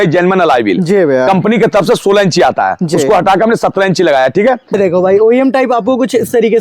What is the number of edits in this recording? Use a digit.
1